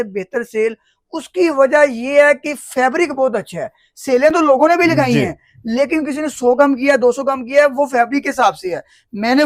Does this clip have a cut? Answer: no; 0 cuts

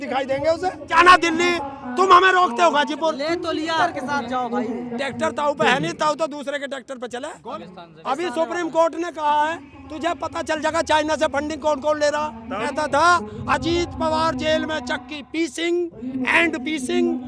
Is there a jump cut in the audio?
yes; 4 cuts; at 0.9 s, 3.7 s, 7.6 s, 12.7 s

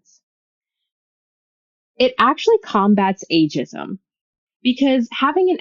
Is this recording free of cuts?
yes; 0 cuts

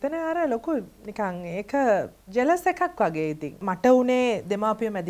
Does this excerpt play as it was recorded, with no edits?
no; 3 cuts; at 1.0 s, 2.2 s, 3.6 s

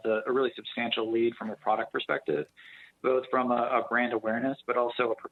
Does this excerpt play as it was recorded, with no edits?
yes; 0 cuts

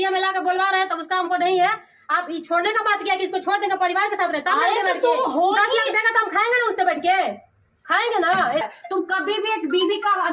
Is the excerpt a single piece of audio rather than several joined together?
no; 1 cut; at 8.6 s

